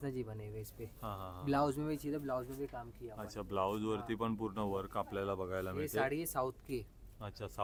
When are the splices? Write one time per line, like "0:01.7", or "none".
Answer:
none